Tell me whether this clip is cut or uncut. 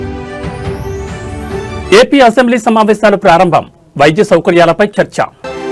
cut